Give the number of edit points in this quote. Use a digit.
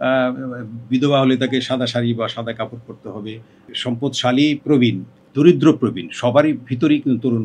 1